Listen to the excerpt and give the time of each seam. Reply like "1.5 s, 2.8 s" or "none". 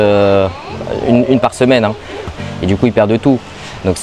2.3 s